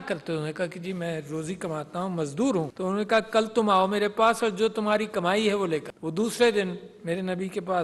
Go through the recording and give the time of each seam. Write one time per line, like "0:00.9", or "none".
0:02.7
0:05.9